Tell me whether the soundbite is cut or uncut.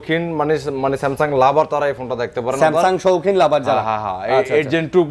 uncut